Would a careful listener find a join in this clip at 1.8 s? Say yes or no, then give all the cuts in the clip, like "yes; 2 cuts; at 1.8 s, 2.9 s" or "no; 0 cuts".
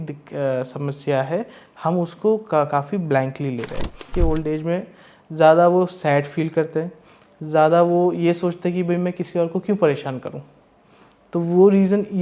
no; 1 cut; at 4.1 s